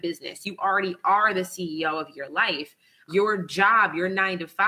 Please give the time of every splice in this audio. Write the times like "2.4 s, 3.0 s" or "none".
1.0 s, 3.1 s